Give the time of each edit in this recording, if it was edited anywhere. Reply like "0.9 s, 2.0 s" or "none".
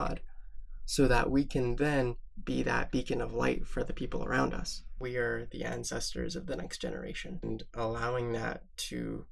5.0 s, 7.4 s